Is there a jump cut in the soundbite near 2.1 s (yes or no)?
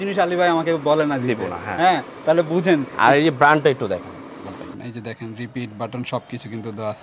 no